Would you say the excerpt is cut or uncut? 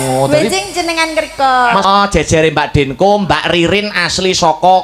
cut